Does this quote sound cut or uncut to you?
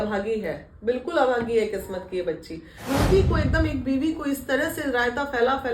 cut